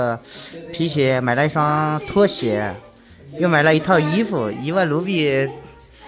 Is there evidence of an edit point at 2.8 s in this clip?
no; 0 cuts

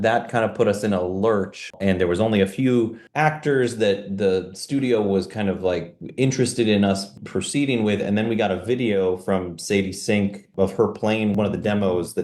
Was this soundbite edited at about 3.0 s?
yes; 3 cuts; at 1.7 s, 3.0 s, 11.3 s

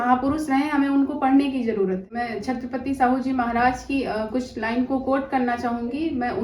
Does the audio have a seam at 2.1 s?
yes; 1 cut; at 2.1 s

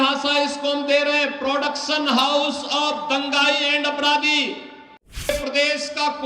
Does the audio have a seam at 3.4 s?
no; 1 cut; at 5.3 s

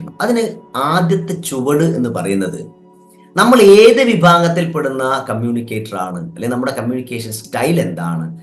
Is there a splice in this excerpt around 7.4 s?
yes; 1 cut; at 7.4 s

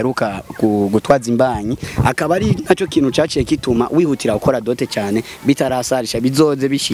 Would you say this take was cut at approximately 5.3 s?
no; 1 cut; at 1.8 s

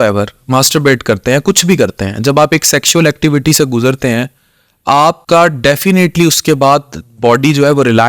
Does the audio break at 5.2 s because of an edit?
yes; 1 cut; at 5.2 s

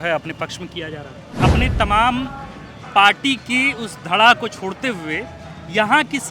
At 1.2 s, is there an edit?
yes; 1 cut; at 1.2 s

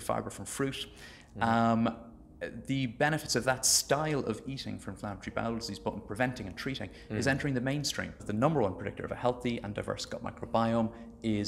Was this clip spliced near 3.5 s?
no; 1 cut; at 8.2 s

